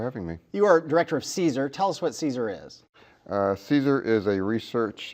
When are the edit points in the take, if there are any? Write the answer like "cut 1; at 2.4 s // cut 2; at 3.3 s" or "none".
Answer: cut 1; at 4.1 s